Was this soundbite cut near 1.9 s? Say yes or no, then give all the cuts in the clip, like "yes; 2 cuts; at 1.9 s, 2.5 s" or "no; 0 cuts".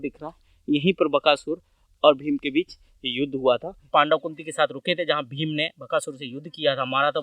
no; 1 cut; at 3.9 s